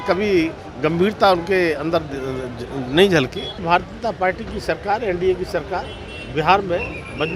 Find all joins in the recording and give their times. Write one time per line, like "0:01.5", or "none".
0:03.6